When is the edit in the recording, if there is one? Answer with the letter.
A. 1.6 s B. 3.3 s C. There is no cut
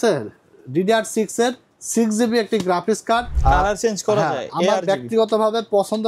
B